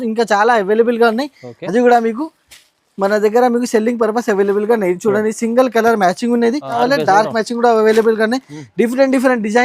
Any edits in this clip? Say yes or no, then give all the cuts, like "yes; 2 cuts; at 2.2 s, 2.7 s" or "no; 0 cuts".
yes; 1 cut; at 6.7 s